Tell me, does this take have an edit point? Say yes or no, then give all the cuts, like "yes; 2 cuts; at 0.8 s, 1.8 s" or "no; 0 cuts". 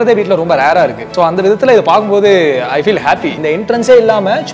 yes; 2 cuts; at 1.0 s, 3.4 s